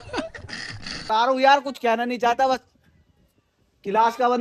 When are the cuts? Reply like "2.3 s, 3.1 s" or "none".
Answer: 1.0 s